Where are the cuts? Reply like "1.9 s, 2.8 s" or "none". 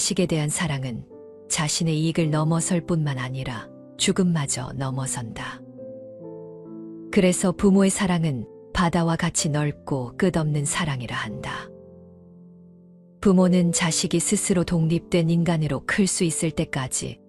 5.5 s, 7.1 s